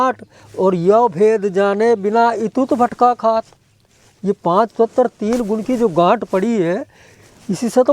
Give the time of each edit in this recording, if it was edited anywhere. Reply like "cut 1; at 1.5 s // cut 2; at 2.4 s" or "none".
none

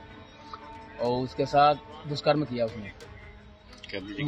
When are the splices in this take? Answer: none

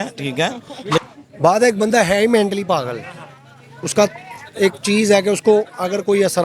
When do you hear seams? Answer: cut 1; at 1.0 s

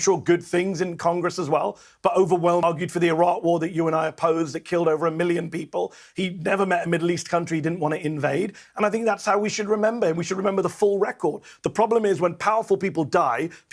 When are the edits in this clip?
cut 1; at 2.6 s

